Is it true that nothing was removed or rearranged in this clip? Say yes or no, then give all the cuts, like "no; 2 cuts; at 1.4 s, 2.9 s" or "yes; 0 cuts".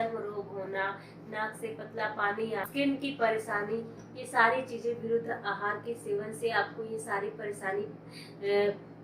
yes; 0 cuts